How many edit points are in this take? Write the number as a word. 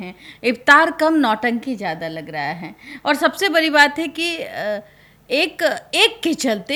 zero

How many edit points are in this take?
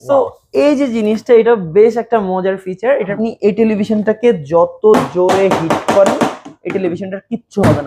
one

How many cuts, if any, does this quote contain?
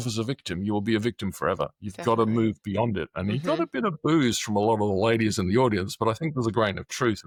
zero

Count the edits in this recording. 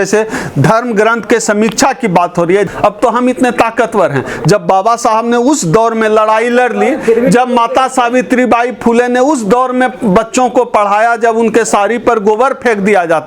one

